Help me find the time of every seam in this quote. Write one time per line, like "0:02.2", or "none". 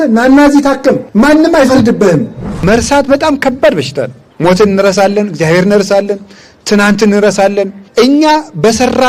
0:01.0
0:02.6
0:04.2
0:07.8